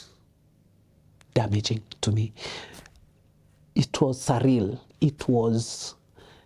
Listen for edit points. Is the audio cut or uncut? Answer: uncut